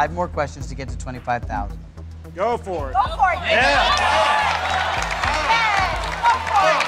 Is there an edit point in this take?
yes; 1 cut; at 2.5 s

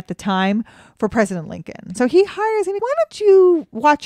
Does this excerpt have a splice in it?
yes; 2 cuts; at 1.9 s, 2.8 s

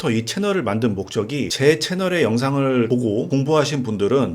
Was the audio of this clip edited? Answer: yes; 2 cuts; at 1.5 s, 3.0 s

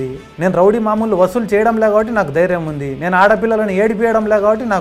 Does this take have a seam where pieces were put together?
no; 0 cuts

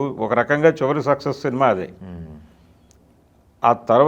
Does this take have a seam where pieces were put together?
no; 0 cuts

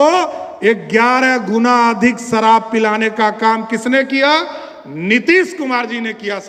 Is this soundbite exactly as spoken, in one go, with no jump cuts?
yes; 0 cuts

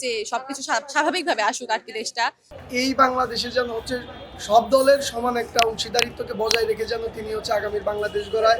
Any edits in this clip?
yes; 1 cut; at 2.5 s

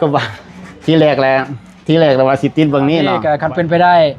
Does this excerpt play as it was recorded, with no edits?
no; 1 cut; at 3.2 s

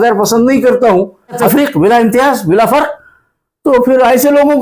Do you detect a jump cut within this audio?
yes; 1 cut; at 1.4 s

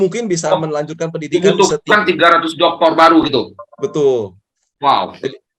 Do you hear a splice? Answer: no; 0 cuts

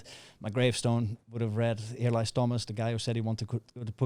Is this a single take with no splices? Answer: yes; 0 cuts

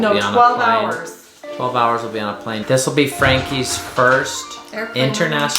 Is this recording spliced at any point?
yes; 1 cut; at 2.6 s

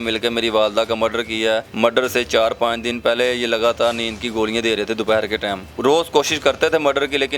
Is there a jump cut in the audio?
yes; 2 cuts; at 1.7 s, 5.7 s

